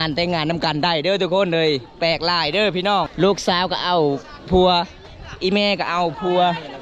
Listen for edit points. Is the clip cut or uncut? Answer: cut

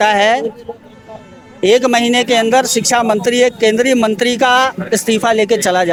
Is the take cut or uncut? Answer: uncut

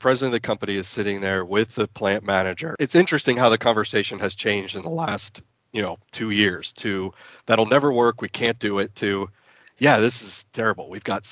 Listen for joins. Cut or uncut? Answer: cut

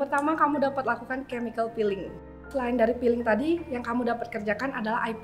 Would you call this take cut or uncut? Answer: cut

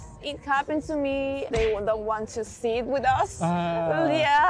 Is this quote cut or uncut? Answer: cut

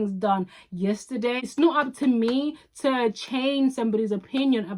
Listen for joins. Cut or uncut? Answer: cut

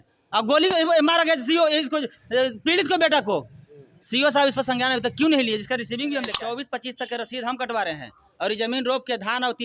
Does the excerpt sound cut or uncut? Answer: cut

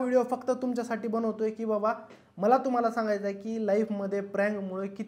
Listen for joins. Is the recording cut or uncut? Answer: uncut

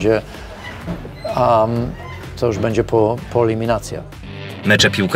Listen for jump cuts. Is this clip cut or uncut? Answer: cut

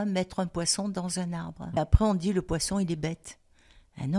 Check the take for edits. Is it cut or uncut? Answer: cut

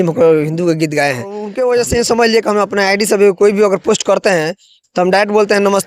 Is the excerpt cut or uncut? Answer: cut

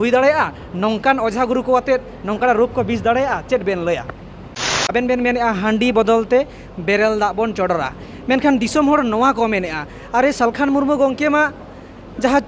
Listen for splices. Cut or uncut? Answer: cut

